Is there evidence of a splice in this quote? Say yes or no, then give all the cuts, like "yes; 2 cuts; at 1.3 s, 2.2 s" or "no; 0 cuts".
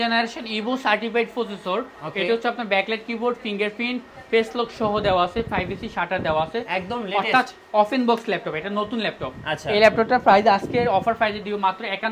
no; 0 cuts